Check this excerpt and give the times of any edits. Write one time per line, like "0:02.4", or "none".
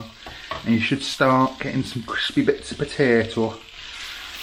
none